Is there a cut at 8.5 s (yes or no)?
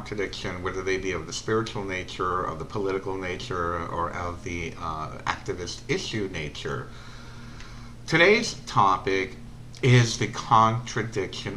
yes